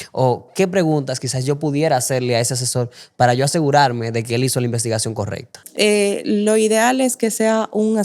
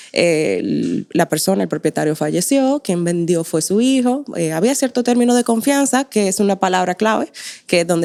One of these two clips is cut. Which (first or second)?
first